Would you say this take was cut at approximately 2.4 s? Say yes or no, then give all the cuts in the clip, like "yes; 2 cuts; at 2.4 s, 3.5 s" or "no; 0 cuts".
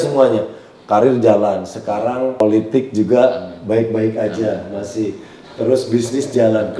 yes; 1 cut; at 2.4 s